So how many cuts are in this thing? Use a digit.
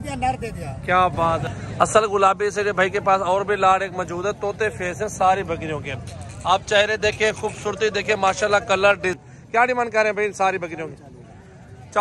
2